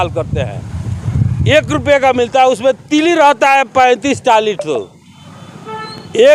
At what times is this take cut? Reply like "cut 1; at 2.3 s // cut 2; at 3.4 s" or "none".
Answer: none

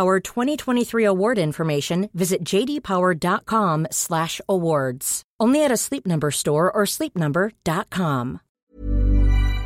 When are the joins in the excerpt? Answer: cut 1; at 8.4 s

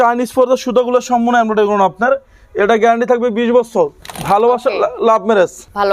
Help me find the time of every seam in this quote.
none

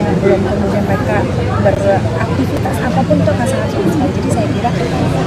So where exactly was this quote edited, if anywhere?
none

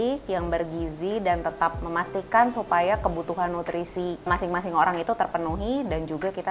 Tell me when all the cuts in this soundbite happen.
cut 1; at 4.3 s

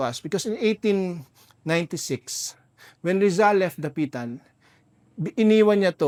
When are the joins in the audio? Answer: none

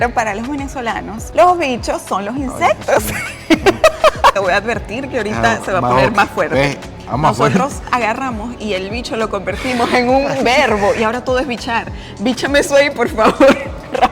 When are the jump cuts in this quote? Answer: cut 1; at 4.4 s

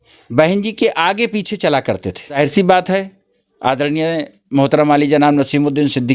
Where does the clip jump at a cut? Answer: cut 1; at 2.4 s

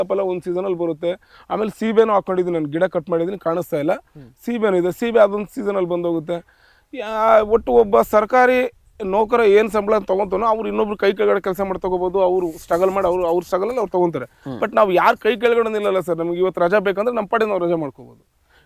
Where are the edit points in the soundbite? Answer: none

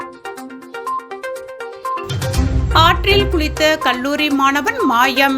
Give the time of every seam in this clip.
cut 1; at 1.1 s

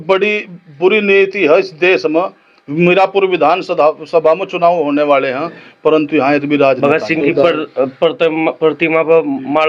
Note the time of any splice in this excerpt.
cut 1; at 6.8 s

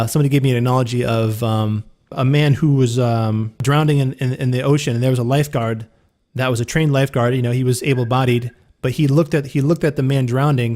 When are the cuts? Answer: cut 1; at 2.1 s // cut 2; at 3.6 s

